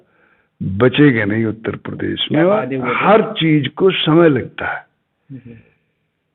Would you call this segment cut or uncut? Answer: cut